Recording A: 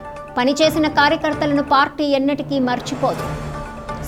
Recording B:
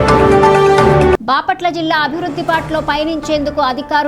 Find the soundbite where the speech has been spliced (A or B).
B